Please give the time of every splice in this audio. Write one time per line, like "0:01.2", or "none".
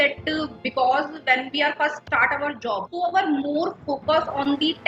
0:02.0
0:02.9